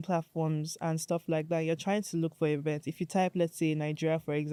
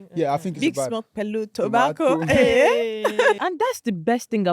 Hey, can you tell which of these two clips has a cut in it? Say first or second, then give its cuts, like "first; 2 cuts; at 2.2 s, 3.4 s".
second; 1 cut; at 3.4 s